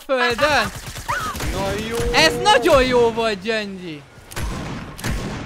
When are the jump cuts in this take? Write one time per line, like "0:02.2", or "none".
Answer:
none